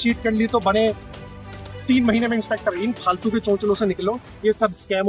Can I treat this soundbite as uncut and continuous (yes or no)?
yes